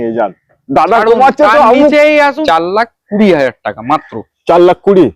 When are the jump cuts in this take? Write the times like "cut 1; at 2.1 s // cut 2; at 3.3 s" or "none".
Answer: cut 1; at 2.4 s